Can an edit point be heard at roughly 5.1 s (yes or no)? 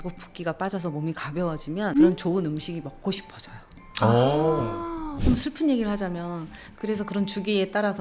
yes